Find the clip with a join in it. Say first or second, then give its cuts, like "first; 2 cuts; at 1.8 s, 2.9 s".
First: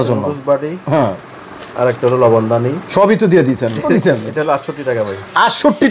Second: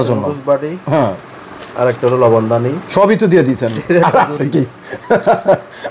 first; 1 cut; at 3.9 s